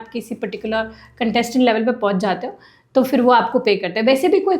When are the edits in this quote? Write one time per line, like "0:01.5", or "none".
none